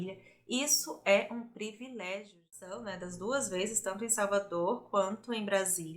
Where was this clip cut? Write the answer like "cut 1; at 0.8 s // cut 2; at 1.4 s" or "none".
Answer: cut 1; at 2.8 s